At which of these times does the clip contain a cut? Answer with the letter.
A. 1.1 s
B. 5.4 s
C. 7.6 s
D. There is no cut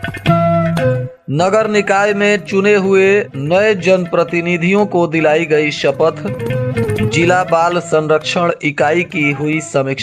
A